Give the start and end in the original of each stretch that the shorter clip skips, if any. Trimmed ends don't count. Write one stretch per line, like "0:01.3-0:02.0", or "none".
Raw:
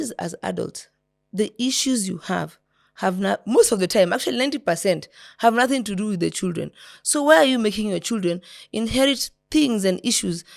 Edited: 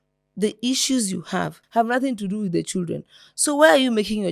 0:02.5-0:05.3

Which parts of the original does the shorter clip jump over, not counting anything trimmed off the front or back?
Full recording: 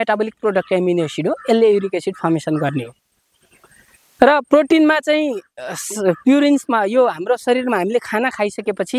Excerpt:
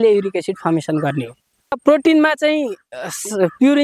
0:03.4-0:04.4

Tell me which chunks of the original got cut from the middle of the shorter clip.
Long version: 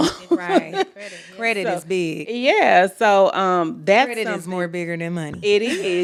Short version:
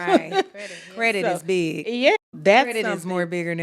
0:02.6-0:03.6

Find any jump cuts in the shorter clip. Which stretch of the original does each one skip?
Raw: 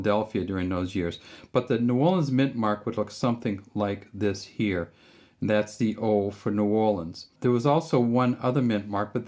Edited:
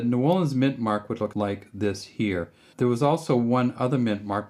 0:03.1-0:03.7
0:05.0-0:07.2

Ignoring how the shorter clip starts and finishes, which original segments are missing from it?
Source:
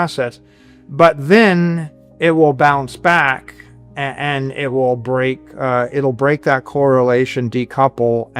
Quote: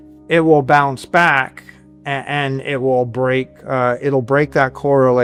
none

